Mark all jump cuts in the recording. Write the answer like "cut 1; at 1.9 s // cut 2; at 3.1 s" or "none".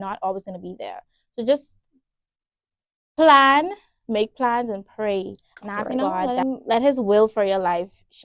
cut 1; at 6.3 s